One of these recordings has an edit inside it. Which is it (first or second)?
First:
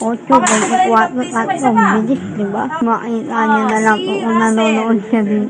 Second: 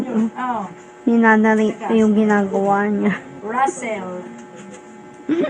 first